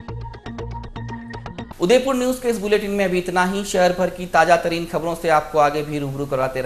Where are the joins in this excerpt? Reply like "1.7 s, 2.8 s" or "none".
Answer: none